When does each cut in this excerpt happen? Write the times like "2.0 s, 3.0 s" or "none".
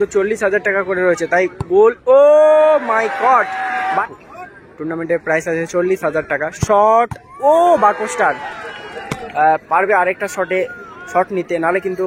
4.1 s, 9.1 s